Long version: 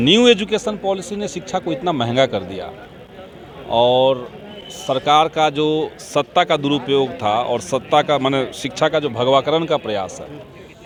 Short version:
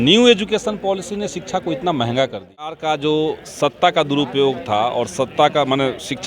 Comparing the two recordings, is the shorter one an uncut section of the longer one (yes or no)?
no